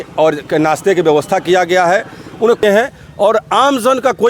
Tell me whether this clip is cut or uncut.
cut